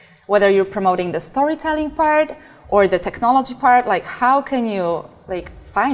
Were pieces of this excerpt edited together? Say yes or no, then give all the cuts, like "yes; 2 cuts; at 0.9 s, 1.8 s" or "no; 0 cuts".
no; 0 cuts